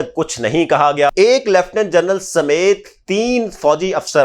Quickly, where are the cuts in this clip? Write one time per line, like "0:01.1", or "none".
0:01.1